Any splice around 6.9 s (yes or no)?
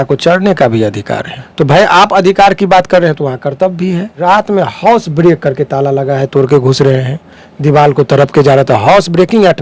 no